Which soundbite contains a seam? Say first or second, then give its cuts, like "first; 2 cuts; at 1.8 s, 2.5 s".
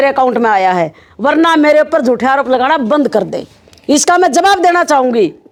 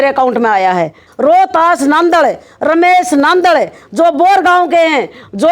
second; 1 cut; at 1.0 s